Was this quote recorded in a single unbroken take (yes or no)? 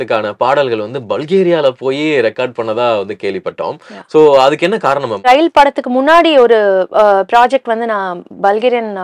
yes